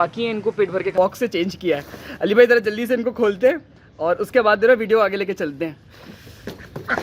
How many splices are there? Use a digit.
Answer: 1